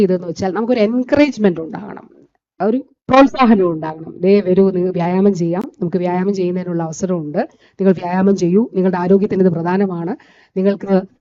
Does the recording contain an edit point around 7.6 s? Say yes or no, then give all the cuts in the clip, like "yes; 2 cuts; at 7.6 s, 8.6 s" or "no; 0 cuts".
no; 0 cuts